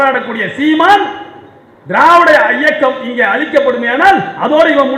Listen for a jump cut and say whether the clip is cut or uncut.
uncut